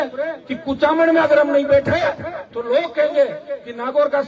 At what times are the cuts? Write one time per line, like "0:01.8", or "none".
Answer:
none